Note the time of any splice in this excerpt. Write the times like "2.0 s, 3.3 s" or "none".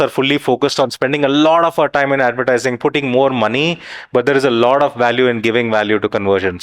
none